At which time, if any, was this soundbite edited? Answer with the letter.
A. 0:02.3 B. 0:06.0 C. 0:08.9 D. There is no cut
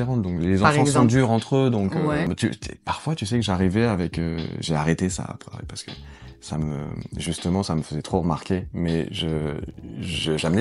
A